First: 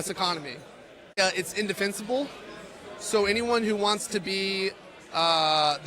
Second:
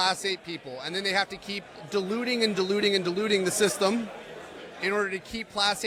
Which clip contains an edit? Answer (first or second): first